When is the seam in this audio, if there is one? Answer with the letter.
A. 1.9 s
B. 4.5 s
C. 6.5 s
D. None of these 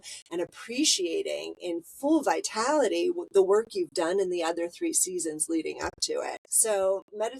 C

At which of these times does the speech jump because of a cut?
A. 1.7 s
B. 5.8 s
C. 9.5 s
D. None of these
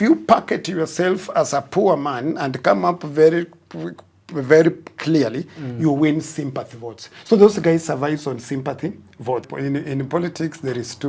C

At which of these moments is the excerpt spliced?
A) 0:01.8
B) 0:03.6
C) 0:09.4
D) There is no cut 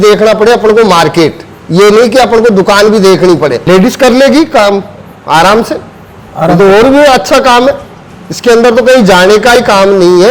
B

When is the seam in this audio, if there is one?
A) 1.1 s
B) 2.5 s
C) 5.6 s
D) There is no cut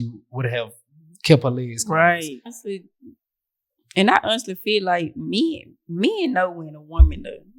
B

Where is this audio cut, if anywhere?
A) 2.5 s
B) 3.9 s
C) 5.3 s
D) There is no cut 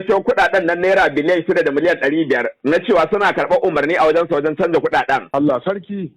C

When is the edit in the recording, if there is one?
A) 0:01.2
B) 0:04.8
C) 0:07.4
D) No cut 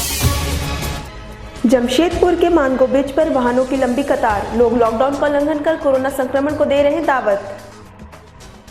A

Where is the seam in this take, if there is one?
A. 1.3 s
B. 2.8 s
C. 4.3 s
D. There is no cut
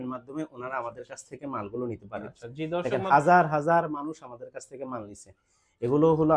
B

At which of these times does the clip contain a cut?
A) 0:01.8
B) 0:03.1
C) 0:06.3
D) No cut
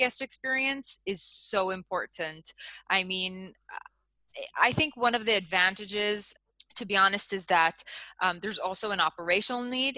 C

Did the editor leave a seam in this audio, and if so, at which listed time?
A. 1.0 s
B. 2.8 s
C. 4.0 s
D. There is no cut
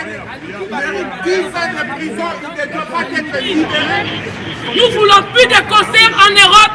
C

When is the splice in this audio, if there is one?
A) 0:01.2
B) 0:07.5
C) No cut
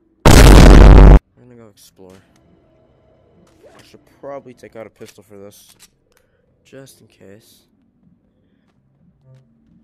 A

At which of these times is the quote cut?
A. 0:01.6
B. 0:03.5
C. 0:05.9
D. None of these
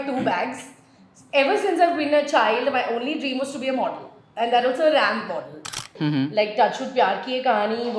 C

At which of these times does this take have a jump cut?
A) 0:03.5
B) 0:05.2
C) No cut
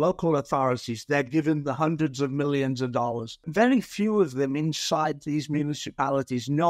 A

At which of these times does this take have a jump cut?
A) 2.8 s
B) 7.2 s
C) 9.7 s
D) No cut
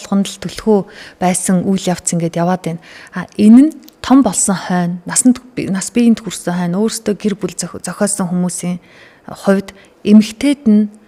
D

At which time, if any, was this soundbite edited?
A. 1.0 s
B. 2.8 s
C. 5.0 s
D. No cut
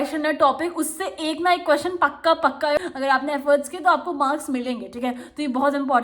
B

